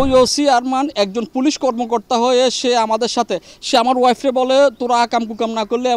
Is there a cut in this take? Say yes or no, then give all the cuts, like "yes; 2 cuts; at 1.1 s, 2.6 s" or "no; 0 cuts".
no; 0 cuts